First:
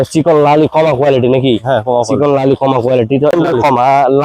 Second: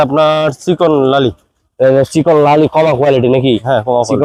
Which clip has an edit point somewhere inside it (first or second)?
first